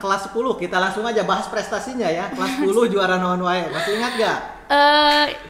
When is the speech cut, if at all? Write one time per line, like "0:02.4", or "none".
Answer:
none